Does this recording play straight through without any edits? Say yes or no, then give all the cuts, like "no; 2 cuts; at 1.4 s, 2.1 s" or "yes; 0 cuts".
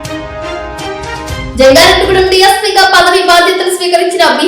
no; 1 cut; at 1.2 s